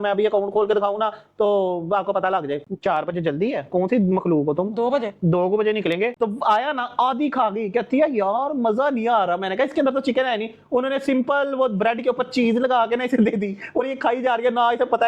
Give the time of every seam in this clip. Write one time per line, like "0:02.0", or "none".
0:02.7
0:06.1